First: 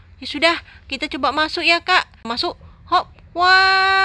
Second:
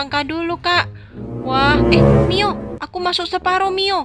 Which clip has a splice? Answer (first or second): first